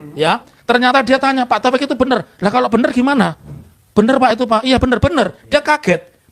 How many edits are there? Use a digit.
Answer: 0